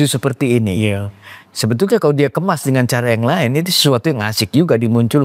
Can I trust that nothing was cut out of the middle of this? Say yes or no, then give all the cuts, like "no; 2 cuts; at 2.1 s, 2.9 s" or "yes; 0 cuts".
yes; 0 cuts